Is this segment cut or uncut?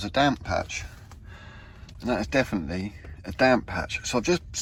uncut